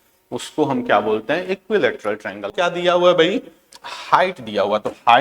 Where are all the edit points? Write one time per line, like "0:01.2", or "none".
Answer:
0:02.5